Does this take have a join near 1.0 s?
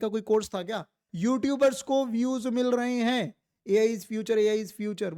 yes; 1 cut; at 1.0 s

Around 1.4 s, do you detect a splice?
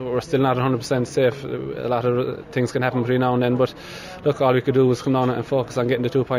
no; 0 cuts

